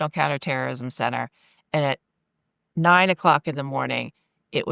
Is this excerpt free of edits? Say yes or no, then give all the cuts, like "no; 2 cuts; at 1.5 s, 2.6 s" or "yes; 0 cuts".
yes; 0 cuts